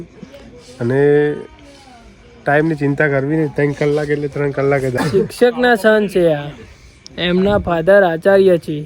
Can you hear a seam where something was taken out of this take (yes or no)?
yes